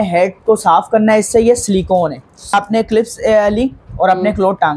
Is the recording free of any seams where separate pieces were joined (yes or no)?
no